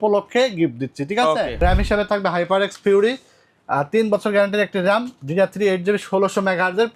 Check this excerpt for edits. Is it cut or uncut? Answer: cut